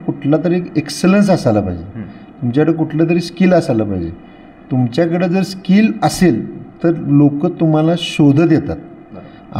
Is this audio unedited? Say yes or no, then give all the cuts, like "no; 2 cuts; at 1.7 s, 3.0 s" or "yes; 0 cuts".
yes; 0 cuts